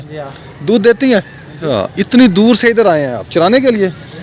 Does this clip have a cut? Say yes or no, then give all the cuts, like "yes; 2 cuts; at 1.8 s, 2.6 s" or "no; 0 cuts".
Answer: yes; 1 cut; at 2.0 s